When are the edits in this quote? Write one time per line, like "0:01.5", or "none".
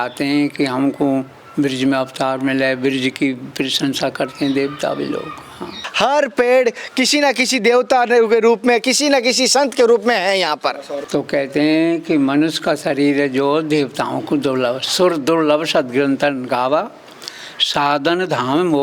0:05.8
0:10.9

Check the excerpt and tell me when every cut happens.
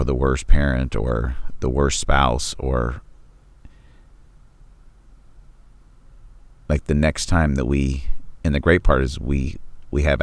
none

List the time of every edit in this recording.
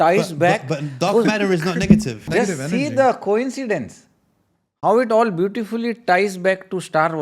0:02.3

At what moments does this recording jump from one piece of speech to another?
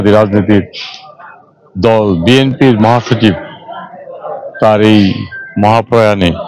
none

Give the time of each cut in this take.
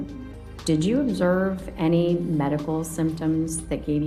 none

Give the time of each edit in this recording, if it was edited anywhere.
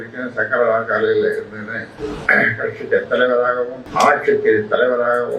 0:01.9
0:03.8

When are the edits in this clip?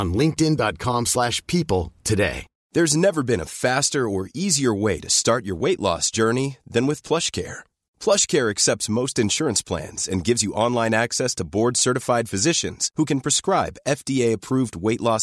none

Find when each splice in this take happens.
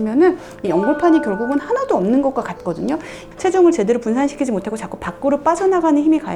none

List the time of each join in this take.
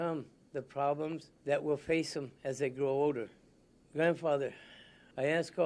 0:03.1

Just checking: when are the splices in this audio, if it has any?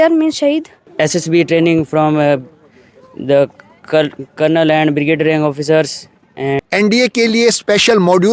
0:00.9
0:06.6

